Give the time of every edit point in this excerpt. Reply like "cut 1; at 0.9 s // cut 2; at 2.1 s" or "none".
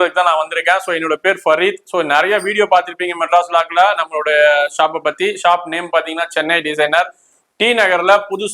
cut 1; at 7.3 s